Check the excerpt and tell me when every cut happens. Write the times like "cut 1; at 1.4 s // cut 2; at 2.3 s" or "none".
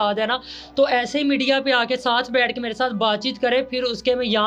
none